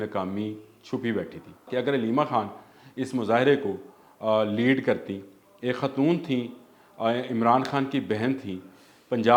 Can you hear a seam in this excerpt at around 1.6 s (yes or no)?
yes